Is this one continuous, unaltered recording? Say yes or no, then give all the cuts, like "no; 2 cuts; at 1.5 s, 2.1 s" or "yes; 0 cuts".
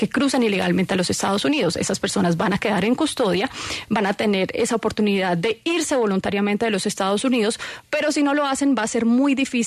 yes; 0 cuts